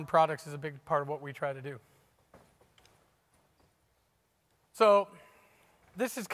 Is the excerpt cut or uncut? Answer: cut